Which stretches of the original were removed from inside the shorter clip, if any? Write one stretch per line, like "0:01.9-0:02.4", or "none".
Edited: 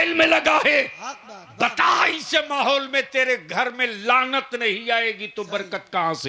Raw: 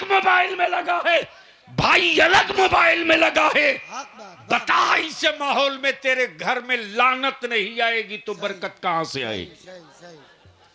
none